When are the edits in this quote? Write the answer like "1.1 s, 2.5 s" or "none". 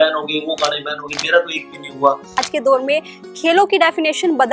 2.4 s